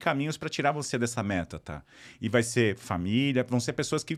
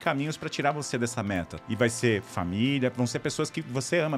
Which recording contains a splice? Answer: second; 1 cut; at 1.6 s

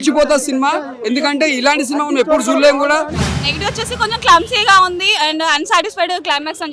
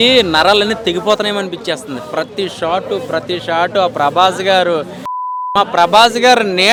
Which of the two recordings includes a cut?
first; 1 cut; at 3.2 s

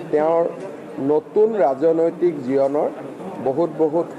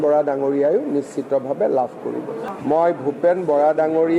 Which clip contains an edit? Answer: second; 1 cut; at 2.5 s

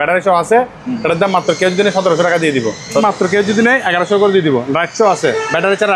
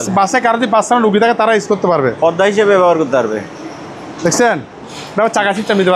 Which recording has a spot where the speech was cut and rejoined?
first; 1 cut; at 3.0 s

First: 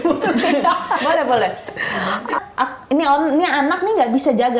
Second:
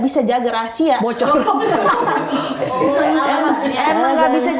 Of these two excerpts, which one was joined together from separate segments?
first; 1 cut; at 2.4 s

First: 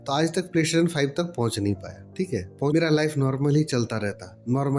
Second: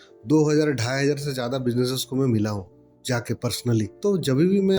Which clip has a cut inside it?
first; 1 cut; at 2.7 s

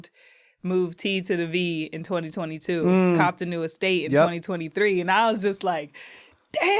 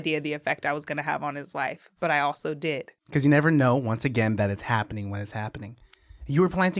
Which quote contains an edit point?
second; 1 cut; at 2.9 s

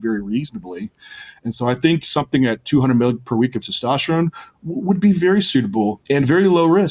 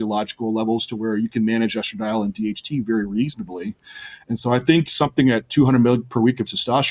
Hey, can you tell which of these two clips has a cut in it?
first; 1 cut; at 6.0 s

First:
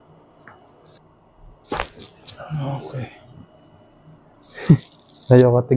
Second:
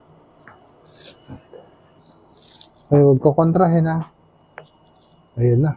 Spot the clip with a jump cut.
first; 1 cut; at 1.0 s

